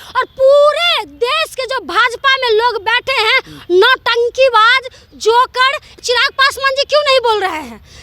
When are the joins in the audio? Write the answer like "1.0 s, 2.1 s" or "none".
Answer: 5.9 s